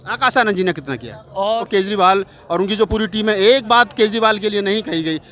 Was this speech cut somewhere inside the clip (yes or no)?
yes